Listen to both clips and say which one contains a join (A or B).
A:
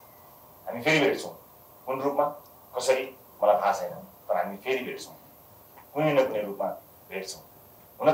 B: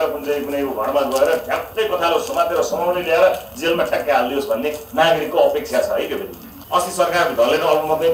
B